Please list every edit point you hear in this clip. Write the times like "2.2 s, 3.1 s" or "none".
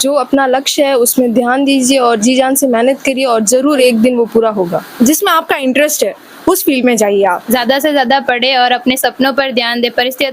4.9 s, 7.4 s